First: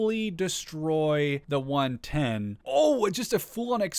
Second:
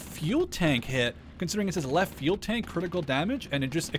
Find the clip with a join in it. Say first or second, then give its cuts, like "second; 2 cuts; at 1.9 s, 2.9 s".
first; 2 cuts; at 1.4 s, 2.6 s